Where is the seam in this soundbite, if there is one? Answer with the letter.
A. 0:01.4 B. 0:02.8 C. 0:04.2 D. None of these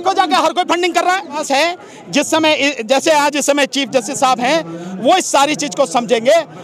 A